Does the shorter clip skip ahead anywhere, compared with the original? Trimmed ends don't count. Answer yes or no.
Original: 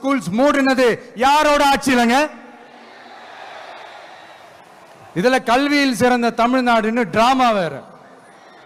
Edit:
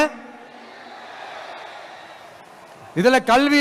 no